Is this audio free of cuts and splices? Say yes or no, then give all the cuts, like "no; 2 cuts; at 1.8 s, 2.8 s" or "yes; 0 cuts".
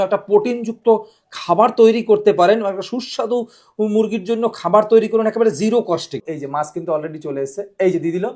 no; 1 cut; at 6.2 s